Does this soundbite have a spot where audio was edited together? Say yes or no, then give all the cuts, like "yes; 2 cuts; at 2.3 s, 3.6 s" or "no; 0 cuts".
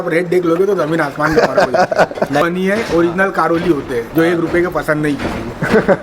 yes; 1 cut; at 2.4 s